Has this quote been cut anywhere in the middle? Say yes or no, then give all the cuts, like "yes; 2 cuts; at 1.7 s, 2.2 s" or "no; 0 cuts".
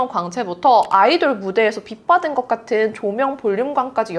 no; 0 cuts